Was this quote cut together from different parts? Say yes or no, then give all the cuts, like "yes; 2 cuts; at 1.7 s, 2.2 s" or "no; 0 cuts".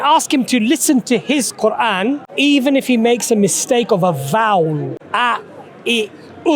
yes; 2 cuts; at 2.3 s, 5.0 s